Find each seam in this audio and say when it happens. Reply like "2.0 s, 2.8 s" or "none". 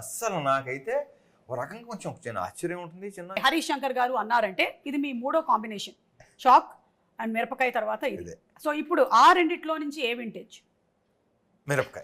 3.4 s